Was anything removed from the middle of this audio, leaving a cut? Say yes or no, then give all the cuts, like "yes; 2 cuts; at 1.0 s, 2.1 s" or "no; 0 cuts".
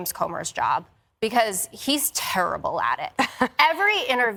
no; 0 cuts